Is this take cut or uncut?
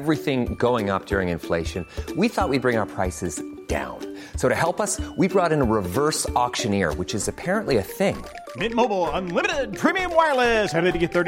uncut